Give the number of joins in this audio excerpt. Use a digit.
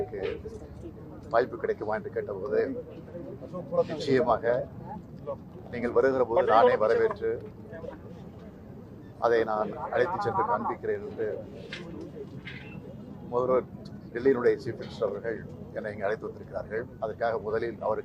0